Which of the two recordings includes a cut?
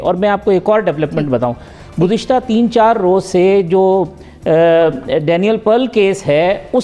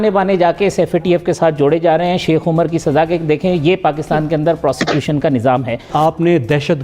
second; 1 cut; at 5.9 s

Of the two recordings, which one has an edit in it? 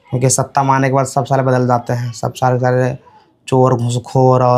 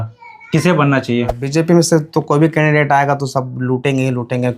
second; 1 cut; at 1.4 s

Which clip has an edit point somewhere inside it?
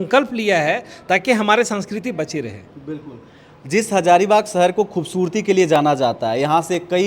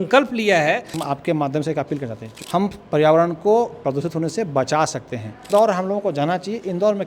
second; 3 cuts; at 0.9 s, 2.3 s, 5.4 s

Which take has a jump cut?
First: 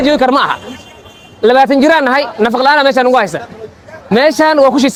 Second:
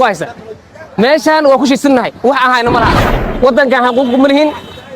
second; 1 cut; at 3.0 s

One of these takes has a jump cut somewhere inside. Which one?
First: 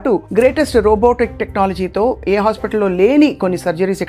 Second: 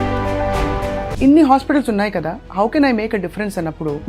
second; 1 cut; at 1.1 s

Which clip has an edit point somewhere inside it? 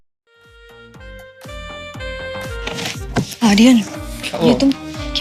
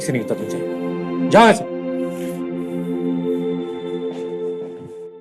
first; 2 cuts; at 1.8 s, 2.3 s

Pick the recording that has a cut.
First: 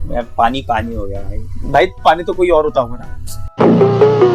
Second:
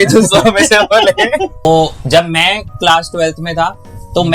second; 1 cut; at 1.6 s

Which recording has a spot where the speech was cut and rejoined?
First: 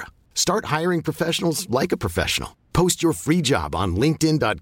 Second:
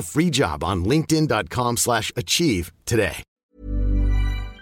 second; 1 cut; at 3.4 s

